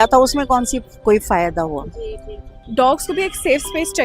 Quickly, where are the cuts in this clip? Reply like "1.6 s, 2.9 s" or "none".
2.6 s

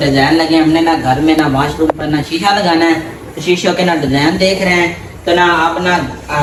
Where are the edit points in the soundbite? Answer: none

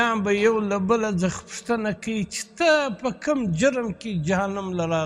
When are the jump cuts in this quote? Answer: none

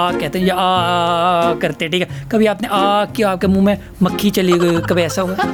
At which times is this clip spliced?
none

